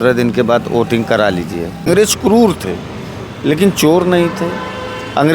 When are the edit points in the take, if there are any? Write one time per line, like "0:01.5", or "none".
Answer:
0:01.9